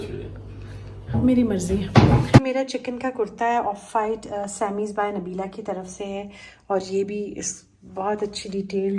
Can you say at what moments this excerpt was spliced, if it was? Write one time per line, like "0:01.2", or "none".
0:02.4